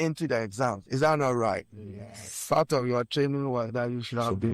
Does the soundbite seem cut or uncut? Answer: uncut